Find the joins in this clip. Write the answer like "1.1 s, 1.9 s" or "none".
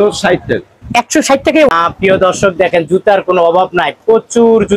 1.7 s

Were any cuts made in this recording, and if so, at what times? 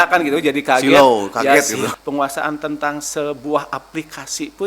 1.9 s

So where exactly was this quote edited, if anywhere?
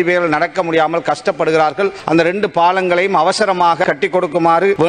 3.8 s

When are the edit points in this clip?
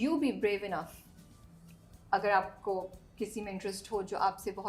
none

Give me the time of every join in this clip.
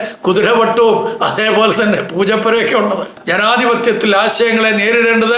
3.1 s

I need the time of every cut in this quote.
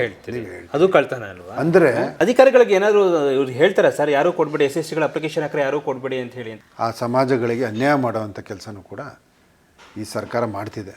2.1 s, 6.5 s

